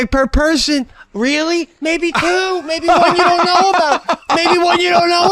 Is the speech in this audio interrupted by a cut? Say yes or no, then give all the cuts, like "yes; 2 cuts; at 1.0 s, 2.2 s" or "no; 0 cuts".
no; 0 cuts